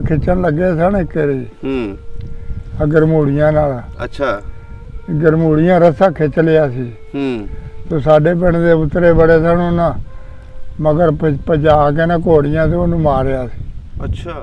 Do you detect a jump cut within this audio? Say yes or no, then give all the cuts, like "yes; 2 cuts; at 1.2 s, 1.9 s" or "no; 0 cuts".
no; 0 cuts